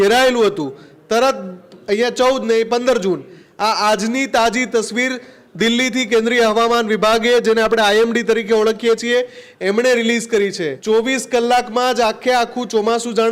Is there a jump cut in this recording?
yes; 1 cut; at 10.7 s

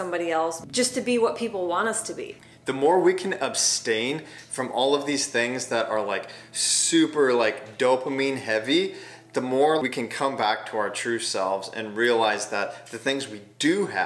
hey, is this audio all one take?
no; 2 cuts; at 2.5 s, 9.8 s

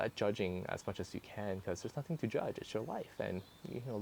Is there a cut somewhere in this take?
no; 0 cuts

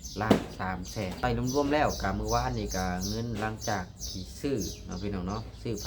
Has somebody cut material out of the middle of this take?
yes; 1 cut; at 1.1 s

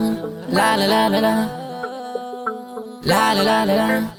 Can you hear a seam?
no; 0 cuts

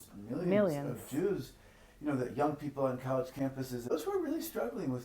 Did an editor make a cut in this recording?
yes; 1 cut; at 3.8 s

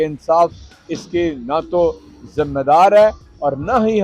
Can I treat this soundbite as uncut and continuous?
yes; 0 cuts

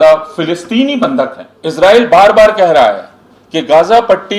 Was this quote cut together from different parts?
yes; 1 cut; at 1.5 s

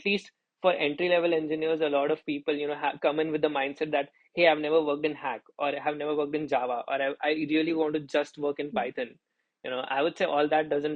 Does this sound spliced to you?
no; 0 cuts

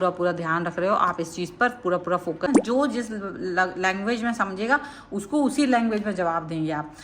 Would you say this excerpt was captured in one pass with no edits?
no; 1 cut; at 2.5 s

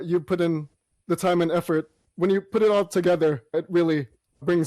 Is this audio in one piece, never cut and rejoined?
no; 1 cut; at 2.0 s

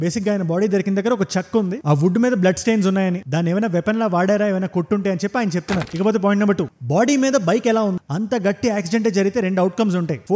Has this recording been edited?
yes; 1 cut; at 5.9 s

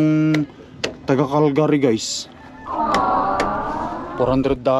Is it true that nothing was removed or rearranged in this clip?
yes; 0 cuts

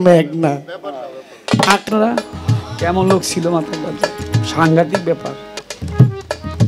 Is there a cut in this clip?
yes; 2 cuts; at 1.9 s, 5.7 s

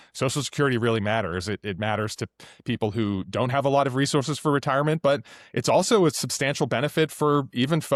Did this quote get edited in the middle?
no; 0 cuts

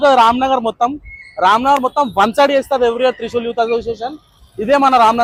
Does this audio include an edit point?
no; 0 cuts

